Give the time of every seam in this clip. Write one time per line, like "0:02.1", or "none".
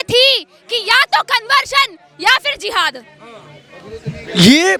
none